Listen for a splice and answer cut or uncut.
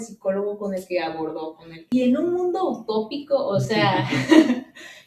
cut